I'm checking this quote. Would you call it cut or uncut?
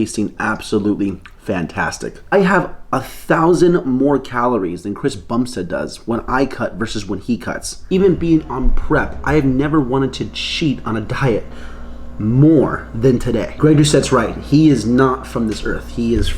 cut